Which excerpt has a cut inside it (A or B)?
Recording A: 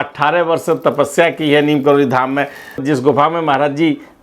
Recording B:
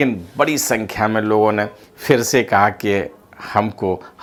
A